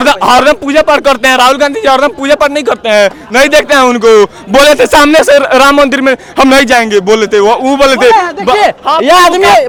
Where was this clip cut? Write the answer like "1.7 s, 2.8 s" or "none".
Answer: none